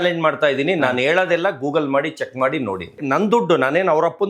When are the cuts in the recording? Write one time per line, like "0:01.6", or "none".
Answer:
0:03.0